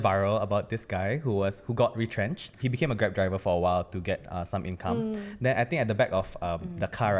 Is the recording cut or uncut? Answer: uncut